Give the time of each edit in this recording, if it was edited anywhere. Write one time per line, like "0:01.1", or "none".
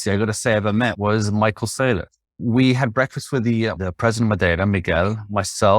0:01.0
0:02.4
0:03.8